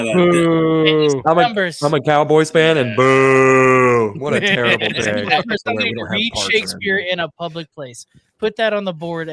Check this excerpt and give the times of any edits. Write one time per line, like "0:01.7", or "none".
0:05.7